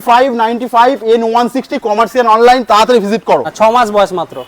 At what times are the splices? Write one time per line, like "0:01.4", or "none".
0:03.5